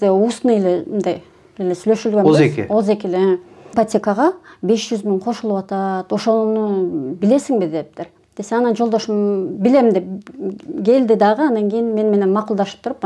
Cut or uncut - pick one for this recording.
cut